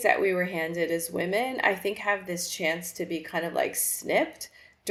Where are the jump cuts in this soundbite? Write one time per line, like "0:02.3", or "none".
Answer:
none